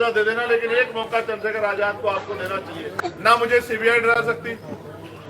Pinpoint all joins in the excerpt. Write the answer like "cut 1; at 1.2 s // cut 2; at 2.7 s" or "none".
cut 1; at 2.9 s

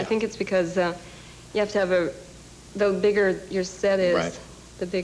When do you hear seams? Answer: none

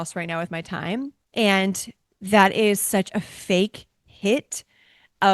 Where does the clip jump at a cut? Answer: cut 1; at 1.2 s

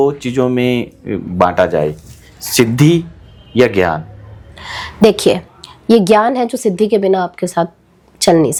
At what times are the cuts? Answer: none

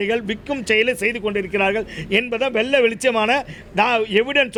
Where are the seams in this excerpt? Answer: none

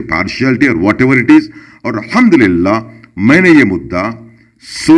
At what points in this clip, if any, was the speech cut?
none

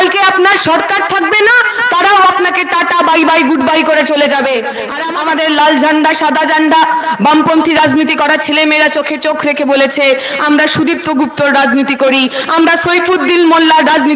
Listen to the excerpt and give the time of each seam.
cut 1; at 4.9 s

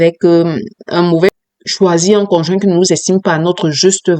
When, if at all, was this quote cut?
cut 1; at 1.3 s

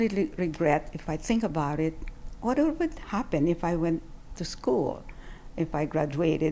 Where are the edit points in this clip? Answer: none

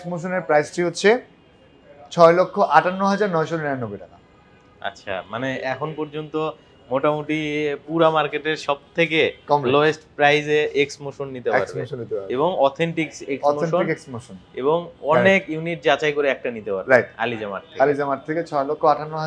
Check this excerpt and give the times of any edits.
none

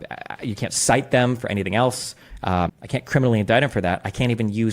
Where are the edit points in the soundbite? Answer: cut 1; at 2.8 s

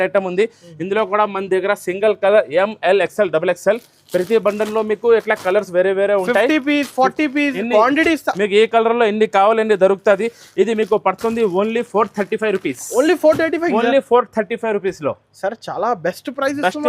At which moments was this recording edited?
none

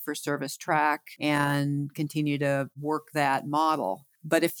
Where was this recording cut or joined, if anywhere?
cut 1; at 1.1 s

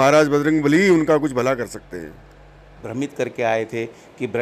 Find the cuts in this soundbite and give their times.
cut 1; at 2.8 s

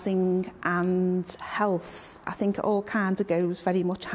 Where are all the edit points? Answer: cut 1; at 2.2 s

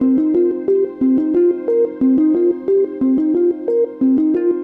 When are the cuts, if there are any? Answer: none

